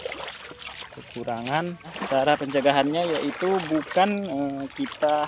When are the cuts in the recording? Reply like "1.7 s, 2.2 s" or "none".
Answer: 1.9 s